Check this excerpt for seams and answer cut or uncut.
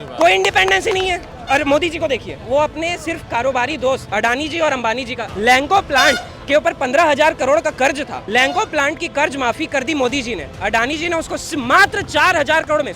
cut